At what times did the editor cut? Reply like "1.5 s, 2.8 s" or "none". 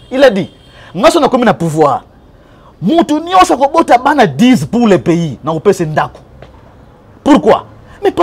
none